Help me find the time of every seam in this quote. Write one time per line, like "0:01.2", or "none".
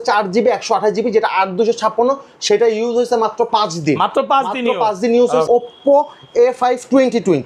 0:05.5